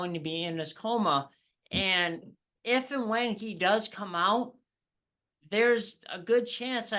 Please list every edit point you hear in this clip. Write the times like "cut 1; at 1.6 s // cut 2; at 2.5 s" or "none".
cut 1; at 2.5 s